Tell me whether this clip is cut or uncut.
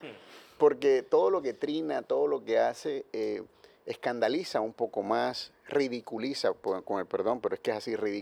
uncut